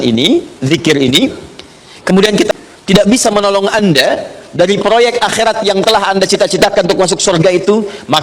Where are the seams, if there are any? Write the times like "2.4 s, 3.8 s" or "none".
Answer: 2.5 s